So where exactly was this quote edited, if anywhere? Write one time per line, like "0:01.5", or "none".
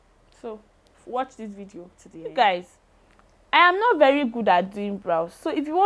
0:02.0